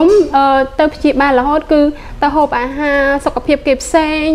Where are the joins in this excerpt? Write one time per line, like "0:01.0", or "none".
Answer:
none